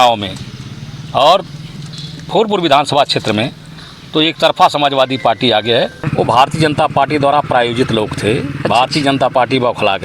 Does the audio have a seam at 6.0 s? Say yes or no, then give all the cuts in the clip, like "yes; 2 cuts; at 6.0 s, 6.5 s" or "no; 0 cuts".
yes; 1 cut; at 6.0 s